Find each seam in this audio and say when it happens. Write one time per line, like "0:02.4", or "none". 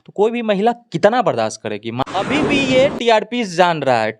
0:01.9